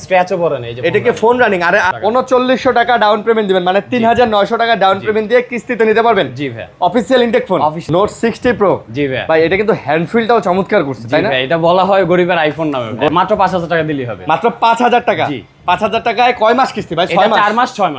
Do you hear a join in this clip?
yes; 3 cuts; at 1.9 s, 7.8 s, 13.1 s

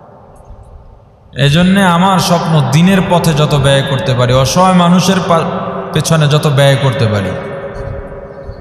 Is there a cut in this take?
no; 0 cuts

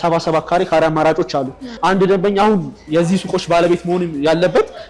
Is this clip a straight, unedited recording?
no; 1 cut; at 1.7 s

